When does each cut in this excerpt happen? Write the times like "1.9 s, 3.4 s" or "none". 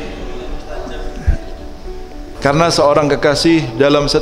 2.4 s